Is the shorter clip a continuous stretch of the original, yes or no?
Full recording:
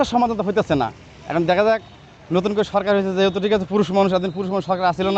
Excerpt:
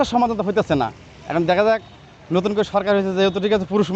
yes